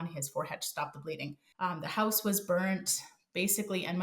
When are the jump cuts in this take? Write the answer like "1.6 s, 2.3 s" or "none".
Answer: 1.4 s